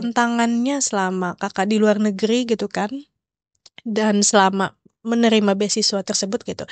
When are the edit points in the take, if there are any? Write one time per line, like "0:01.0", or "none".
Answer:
none